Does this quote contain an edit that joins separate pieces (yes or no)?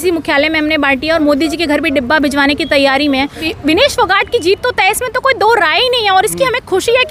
yes